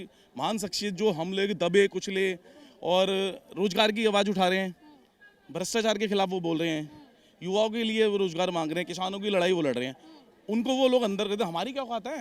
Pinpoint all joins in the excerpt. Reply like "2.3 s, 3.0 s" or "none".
none